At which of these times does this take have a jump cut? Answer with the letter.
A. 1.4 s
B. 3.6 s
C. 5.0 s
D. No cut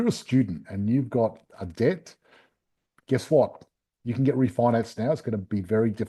D